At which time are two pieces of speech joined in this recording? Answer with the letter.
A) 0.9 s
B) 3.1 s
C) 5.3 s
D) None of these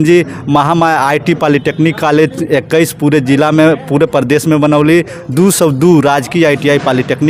D